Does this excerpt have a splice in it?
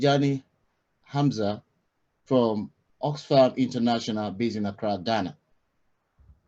no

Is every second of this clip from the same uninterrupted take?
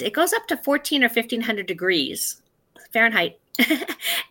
yes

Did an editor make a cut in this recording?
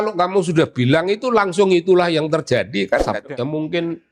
yes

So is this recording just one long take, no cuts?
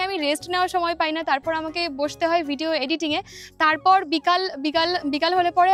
yes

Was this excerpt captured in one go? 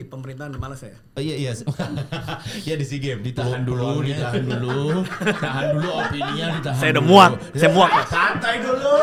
yes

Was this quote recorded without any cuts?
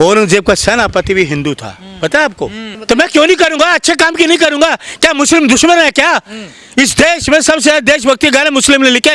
no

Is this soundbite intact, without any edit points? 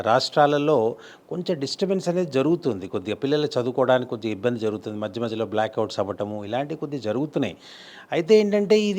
yes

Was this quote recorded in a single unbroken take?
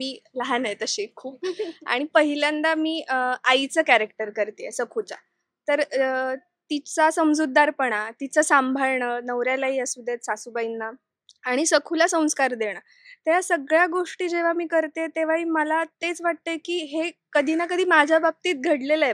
yes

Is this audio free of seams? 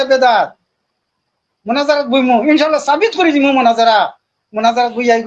yes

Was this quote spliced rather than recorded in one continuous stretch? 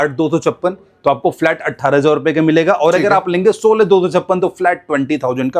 no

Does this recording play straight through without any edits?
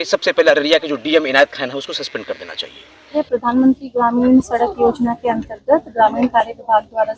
no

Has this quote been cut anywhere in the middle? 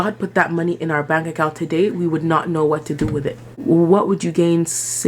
yes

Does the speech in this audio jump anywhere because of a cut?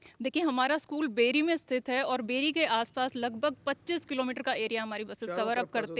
no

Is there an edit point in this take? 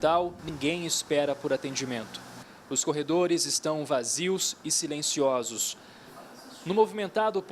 no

